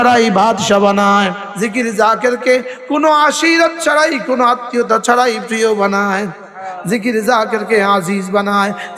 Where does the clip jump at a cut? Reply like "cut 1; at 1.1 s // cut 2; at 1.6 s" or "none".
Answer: cut 1; at 1.4 s